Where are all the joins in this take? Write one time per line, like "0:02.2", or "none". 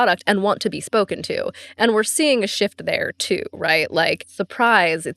0:04.3